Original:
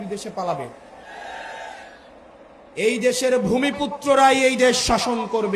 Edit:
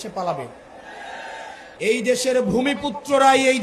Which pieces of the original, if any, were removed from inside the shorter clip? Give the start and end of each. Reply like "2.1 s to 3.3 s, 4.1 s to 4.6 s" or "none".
1.8 s to 2.6 s

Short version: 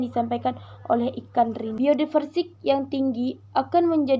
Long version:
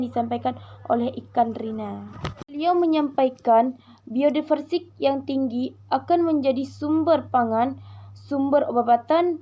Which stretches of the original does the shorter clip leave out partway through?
1.7 s to 4.1 s

